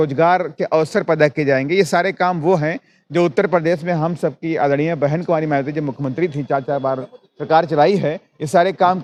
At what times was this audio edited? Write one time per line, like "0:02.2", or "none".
none